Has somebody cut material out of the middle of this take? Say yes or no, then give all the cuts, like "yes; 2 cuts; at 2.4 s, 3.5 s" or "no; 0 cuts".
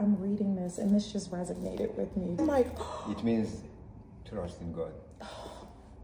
no; 0 cuts